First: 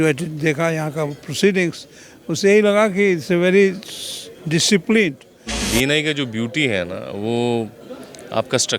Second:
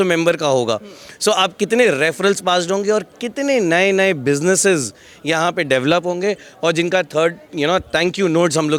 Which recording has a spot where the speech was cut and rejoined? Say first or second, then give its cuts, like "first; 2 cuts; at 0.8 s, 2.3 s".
first; 1 cut; at 5.7 s